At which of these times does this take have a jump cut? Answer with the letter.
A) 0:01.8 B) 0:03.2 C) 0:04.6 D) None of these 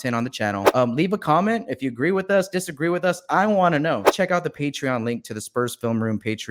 D